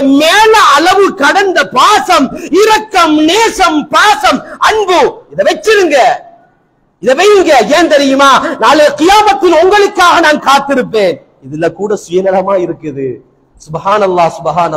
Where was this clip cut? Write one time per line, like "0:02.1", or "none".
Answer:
none